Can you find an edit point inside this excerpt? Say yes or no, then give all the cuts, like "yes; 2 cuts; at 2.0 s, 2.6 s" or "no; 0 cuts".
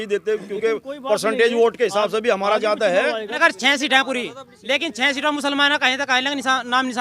yes; 1 cut; at 3.4 s